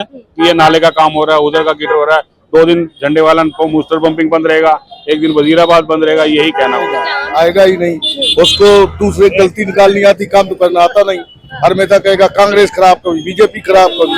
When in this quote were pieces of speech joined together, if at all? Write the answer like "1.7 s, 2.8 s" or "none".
7.2 s